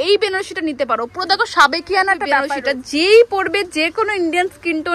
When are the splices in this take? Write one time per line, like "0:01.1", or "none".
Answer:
0:02.5